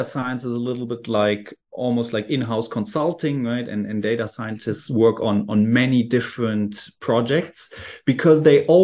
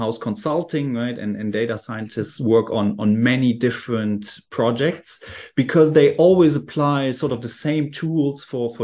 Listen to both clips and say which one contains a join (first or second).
first